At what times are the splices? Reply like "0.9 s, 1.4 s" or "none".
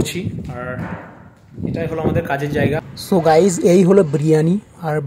2.8 s